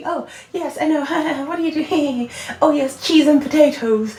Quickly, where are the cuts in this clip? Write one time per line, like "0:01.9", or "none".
none